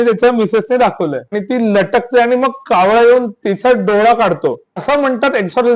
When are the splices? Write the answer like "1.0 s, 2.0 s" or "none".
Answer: 1.4 s, 4.8 s